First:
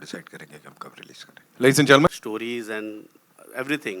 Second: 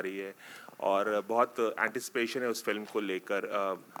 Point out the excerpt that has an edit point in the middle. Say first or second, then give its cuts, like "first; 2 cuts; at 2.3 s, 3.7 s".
first; 1 cut; at 2.1 s